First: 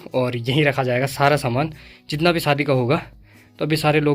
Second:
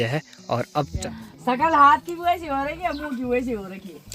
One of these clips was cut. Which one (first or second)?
second